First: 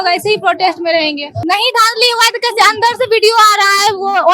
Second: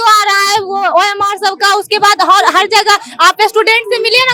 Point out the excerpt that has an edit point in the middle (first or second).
first